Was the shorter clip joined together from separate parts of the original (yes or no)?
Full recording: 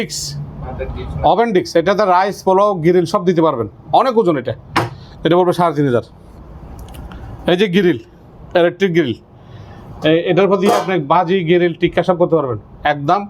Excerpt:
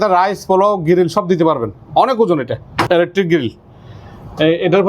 yes